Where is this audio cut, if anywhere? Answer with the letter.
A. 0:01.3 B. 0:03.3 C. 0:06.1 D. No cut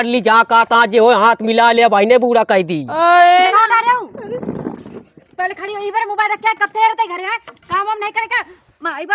B